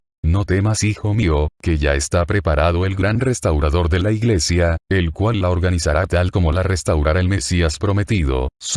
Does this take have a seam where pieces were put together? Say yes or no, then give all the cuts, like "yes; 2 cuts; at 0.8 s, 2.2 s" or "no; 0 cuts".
no; 0 cuts